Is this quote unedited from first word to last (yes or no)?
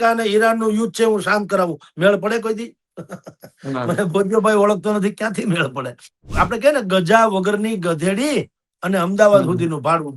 no